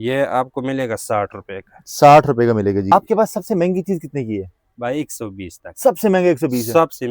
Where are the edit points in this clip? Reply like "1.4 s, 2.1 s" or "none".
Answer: 2.9 s

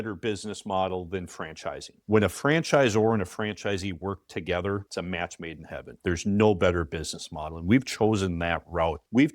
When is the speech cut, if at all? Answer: 1.9 s

